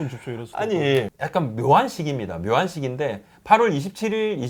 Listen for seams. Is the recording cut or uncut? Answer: uncut